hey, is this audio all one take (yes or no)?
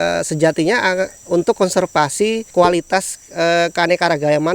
no